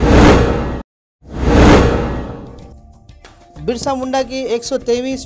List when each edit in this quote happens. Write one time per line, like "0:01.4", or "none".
0:02.1
0:02.9